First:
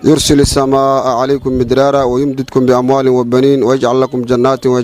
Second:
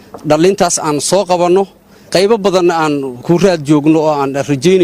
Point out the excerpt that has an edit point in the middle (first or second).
second